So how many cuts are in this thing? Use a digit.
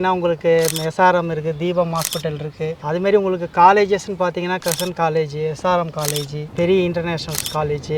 1